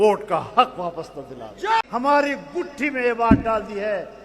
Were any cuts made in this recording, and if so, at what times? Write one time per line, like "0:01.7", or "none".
0:01.9